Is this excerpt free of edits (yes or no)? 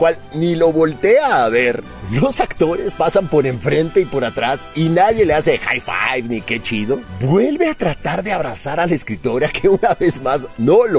yes